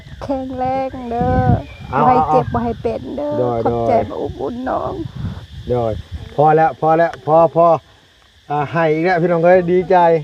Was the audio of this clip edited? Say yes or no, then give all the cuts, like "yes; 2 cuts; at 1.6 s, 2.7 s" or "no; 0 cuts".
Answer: no; 0 cuts